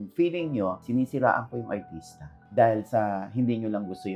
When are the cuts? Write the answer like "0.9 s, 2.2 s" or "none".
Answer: none